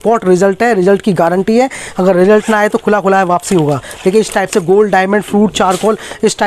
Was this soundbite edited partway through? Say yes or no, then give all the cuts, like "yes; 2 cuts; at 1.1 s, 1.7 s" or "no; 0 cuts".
no; 0 cuts